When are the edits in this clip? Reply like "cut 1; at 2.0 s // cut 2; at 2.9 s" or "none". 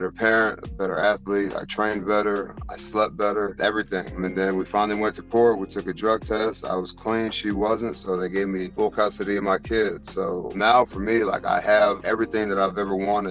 none